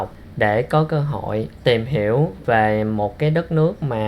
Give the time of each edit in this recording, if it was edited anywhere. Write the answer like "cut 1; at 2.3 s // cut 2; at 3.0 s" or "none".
cut 1; at 2.4 s